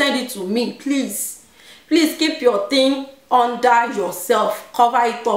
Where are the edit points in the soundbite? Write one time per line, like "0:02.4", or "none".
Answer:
none